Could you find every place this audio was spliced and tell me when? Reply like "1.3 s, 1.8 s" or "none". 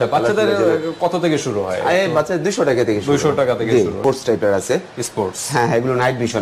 4.0 s